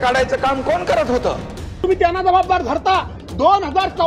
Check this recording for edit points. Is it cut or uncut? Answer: cut